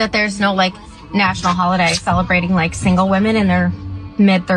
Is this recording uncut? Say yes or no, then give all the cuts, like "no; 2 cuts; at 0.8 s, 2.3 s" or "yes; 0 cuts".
yes; 0 cuts